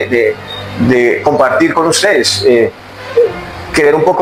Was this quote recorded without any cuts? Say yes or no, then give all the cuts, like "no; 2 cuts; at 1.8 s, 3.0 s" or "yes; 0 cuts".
yes; 0 cuts